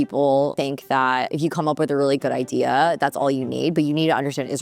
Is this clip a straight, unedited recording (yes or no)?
no